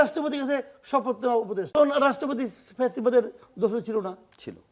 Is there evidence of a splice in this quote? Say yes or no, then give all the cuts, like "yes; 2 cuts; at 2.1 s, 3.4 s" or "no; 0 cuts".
yes; 1 cut; at 1.7 s